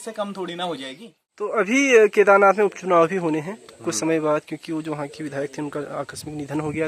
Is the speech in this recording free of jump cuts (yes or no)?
no